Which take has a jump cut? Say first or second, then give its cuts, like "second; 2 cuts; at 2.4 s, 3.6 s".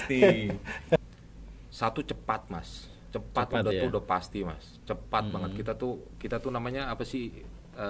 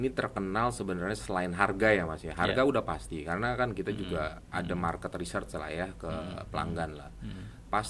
first; 1 cut; at 1.0 s